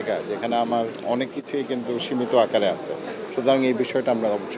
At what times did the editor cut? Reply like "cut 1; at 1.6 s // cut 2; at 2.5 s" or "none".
none